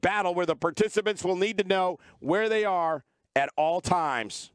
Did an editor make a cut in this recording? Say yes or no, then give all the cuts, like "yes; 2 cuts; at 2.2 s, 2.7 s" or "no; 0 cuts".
no; 0 cuts